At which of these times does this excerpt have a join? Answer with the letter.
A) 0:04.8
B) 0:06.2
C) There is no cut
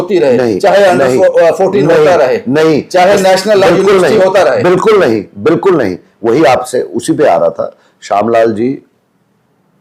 C